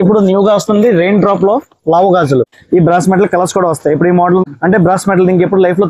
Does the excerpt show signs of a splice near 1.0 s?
no; 2 cuts; at 2.6 s, 4.4 s

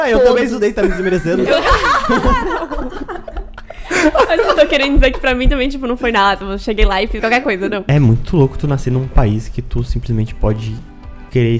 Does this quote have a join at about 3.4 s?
no; 1 cut; at 7.8 s

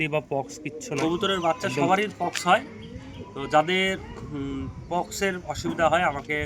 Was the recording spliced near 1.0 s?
yes; 1 cut; at 1.0 s

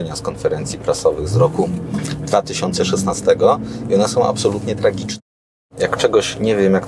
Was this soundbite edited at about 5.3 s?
yes; 1 cut; at 5.3 s

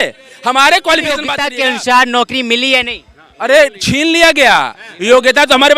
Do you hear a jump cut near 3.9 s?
no; 1 cut; at 1.4 s

